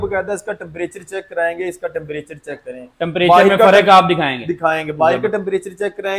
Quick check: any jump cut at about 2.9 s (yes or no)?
no